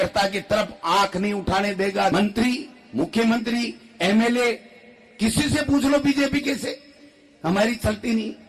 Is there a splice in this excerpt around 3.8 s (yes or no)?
no